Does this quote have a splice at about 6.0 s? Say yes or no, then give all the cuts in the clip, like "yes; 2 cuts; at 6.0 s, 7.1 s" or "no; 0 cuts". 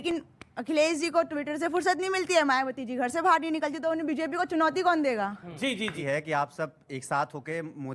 yes; 1 cut; at 6.0 s